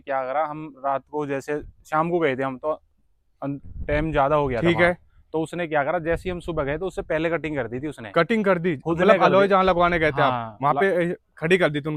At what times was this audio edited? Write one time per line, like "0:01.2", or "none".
none